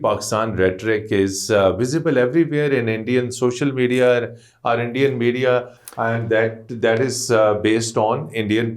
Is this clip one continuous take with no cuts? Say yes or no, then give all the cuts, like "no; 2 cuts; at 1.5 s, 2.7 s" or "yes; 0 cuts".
yes; 0 cuts